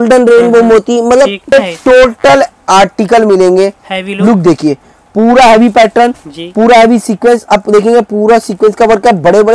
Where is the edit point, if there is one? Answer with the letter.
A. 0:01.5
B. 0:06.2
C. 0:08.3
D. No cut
A